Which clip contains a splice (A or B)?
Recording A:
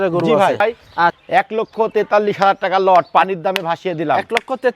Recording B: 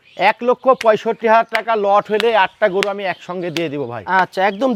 A